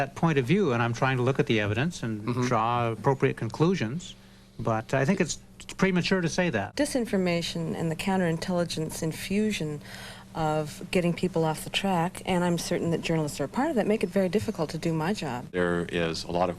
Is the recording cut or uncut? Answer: cut